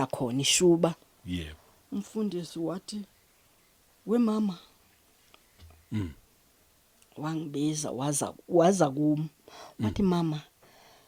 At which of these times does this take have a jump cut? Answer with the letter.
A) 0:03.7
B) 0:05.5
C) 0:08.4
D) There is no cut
D